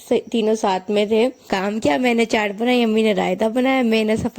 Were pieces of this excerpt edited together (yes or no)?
yes